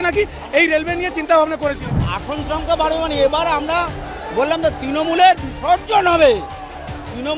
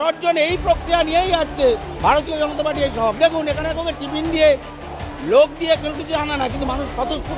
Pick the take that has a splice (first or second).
first